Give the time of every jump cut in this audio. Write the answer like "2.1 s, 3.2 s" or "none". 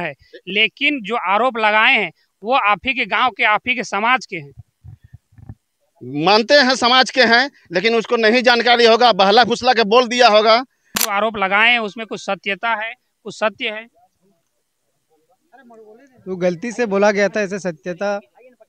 11.0 s